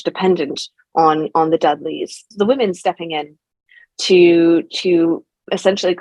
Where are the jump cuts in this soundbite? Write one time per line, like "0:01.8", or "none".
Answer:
0:02.3